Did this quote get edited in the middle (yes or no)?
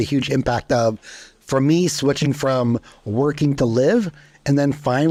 no